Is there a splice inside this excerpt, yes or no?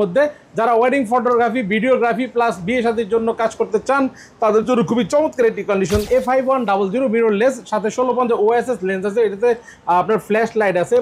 yes